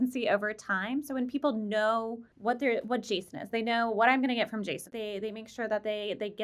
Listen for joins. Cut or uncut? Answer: cut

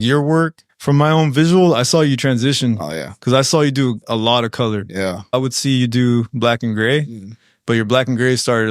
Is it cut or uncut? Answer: uncut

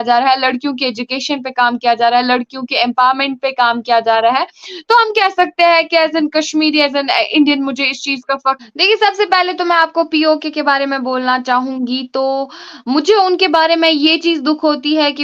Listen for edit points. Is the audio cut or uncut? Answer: cut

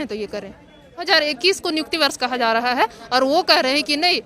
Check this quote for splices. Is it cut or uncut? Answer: cut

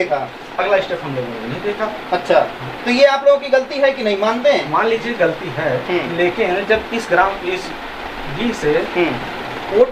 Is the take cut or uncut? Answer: uncut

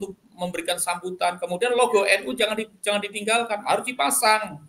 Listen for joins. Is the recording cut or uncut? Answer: uncut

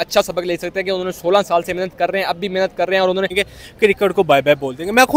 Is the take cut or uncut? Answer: cut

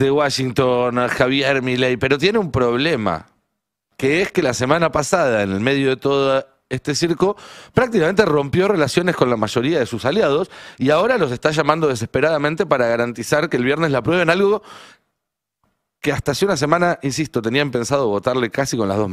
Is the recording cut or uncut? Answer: uncut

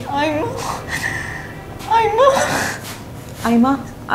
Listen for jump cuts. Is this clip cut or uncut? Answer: uncut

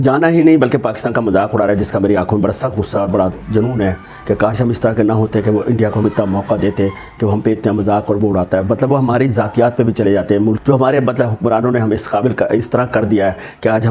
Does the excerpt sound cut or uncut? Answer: cut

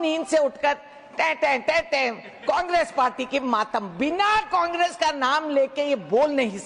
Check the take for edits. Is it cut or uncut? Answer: uncut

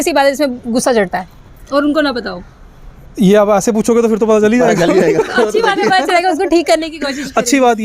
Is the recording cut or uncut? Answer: uncut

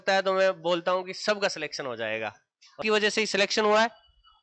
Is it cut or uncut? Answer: cut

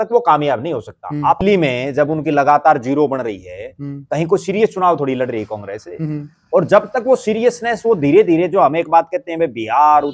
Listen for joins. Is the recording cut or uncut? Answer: cut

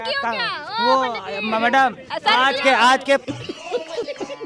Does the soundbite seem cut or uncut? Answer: uncut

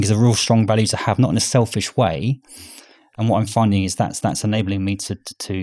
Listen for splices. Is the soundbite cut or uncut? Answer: uncut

